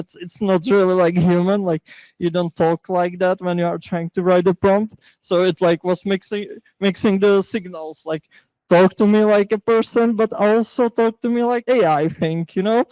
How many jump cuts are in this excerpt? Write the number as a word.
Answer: one